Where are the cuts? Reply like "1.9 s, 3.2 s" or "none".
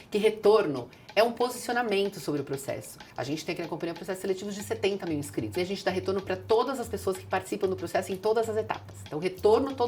3.0 s, 5.6 s